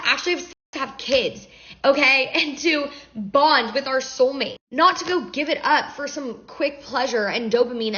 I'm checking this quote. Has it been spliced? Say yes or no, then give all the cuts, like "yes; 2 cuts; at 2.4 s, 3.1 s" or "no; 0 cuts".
no; 0 cuts